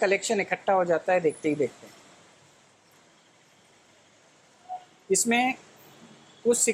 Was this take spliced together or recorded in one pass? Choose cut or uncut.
uncut